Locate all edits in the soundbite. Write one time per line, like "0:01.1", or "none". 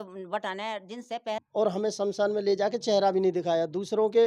0:01.4